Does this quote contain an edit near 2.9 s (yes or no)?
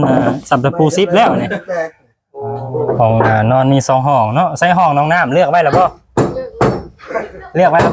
yes